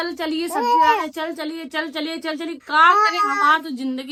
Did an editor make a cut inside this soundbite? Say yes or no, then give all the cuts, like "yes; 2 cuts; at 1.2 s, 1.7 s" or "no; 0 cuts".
no; 0 cuts